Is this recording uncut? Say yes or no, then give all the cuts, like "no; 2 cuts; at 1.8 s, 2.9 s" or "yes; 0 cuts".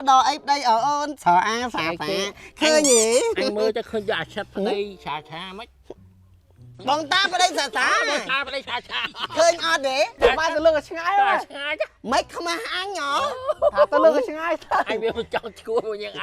no; 1 cut; at 10.2 s